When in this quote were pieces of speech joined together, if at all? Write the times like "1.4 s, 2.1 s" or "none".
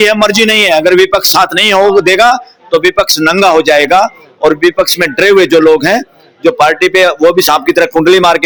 none